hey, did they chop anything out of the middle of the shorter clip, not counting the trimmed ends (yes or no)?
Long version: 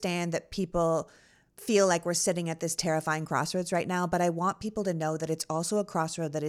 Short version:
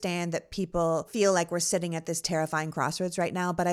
yes